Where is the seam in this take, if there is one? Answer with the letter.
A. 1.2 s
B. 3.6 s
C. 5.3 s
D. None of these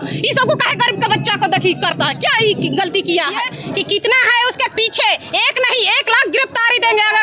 B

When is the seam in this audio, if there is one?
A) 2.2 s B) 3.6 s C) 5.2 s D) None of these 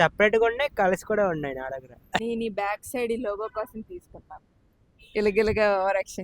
A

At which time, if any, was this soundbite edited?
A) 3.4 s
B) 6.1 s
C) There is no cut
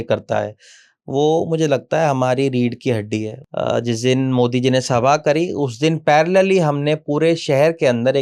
A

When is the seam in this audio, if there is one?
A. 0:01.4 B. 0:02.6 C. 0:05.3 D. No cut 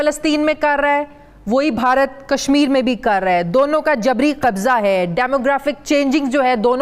D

